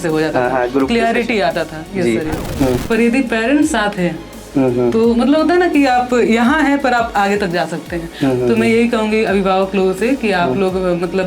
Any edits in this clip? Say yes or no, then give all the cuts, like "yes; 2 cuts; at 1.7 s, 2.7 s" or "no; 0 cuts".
yes; 1 cut; at 2.5 s